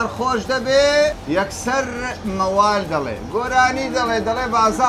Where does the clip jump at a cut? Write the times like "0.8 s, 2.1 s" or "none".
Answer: 1.2 s